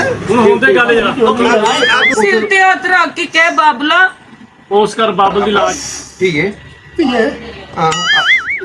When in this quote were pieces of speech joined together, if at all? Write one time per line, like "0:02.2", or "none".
0:02.1
0:05.7